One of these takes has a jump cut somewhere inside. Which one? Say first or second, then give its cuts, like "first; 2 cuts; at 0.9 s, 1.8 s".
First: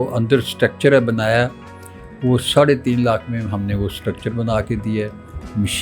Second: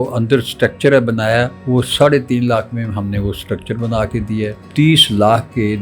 second; 2 cuts; at 1.6 s, 4.6 s